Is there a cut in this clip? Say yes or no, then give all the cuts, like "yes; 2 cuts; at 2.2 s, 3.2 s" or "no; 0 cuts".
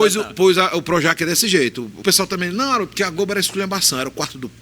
yes; 1 cut; at 2.0 s